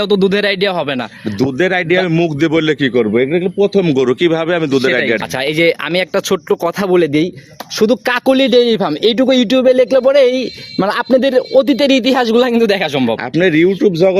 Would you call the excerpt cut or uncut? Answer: cut